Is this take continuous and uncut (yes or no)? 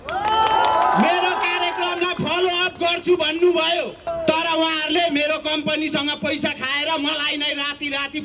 no